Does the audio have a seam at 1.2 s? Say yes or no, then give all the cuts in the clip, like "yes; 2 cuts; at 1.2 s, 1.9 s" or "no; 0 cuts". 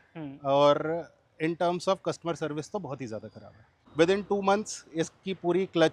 no; 1 cut; at 3.7 s